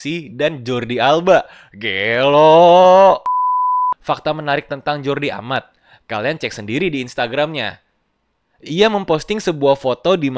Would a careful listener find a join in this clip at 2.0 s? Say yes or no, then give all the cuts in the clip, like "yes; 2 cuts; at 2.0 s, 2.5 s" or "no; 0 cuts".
no; 1 cut; at 3.6 s